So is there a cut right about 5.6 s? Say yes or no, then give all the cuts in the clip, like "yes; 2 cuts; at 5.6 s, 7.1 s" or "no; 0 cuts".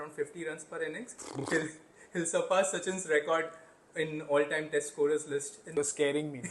yes; 1 cut; at 5.6 s